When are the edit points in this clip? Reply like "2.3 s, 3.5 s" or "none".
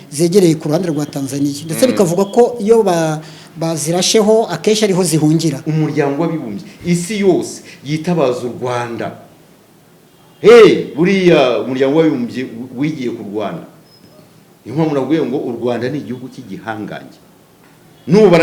5.6 s

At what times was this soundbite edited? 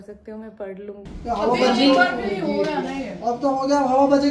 1.1 s

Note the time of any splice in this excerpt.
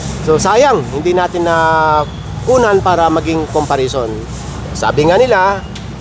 none

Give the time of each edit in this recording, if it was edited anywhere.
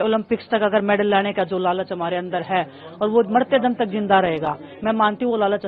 none

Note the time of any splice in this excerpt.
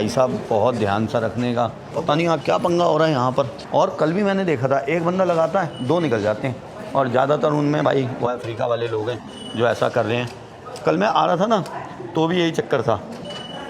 none

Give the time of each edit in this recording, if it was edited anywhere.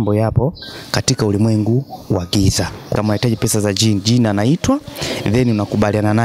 2.9 s

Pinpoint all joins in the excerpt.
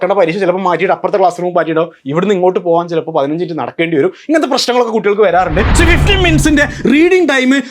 5.7 s

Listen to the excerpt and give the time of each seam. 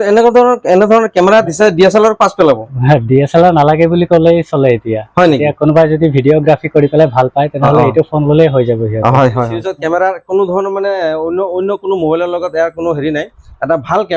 9.6 s

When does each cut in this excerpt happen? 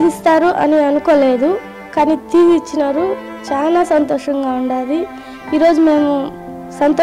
5.3 s

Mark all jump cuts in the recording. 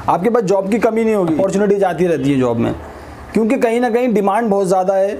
1.4 s

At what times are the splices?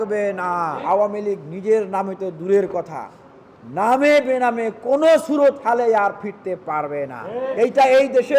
0.8 s, 7.5 s

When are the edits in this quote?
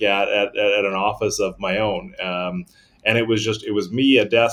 none

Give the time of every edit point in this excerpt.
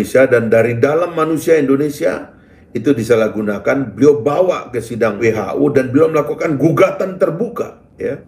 5.2 s

